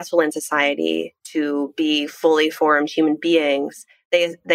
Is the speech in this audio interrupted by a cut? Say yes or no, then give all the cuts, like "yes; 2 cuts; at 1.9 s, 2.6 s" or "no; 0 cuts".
yes; 1 cut; at 1.2 s